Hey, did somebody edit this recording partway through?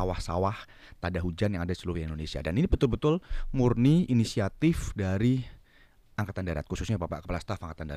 no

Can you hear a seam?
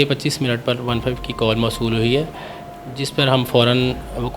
no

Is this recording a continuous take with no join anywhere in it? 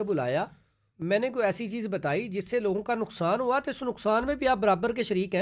yes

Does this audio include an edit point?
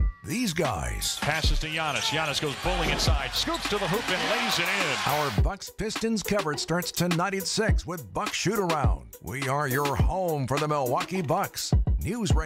no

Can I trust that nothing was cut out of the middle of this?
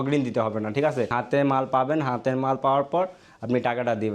no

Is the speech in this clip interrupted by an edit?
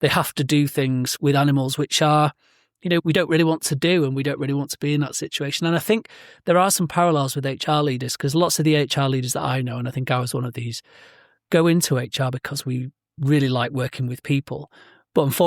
yes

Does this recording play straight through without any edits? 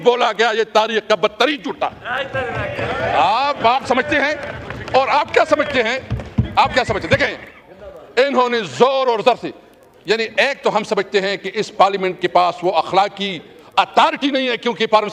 yes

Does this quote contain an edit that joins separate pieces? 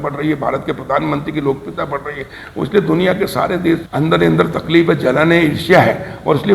yes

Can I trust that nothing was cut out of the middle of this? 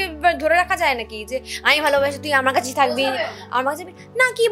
yes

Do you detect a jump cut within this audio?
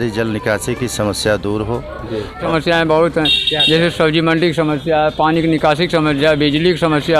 yes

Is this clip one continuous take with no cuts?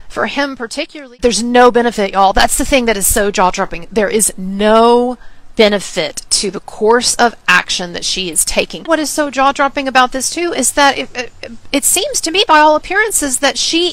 no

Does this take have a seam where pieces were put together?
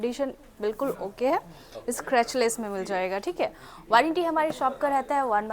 no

